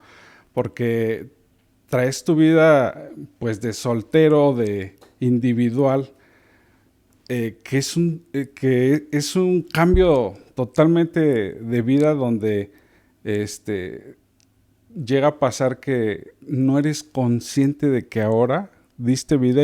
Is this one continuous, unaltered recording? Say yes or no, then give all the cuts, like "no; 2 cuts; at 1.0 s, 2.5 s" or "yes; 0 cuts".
yes; 0 cuts